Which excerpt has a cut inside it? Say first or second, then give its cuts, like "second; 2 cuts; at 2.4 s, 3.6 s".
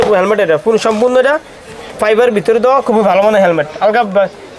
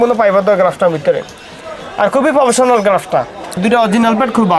second; 1 cut; at 3.6 s